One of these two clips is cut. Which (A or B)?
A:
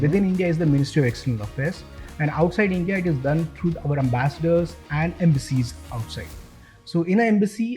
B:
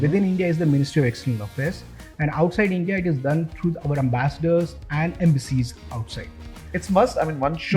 B